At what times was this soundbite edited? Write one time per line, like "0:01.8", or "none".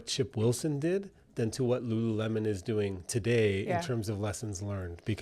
none